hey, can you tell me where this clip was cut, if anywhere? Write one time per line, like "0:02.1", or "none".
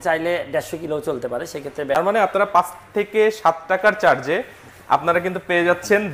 0:02.0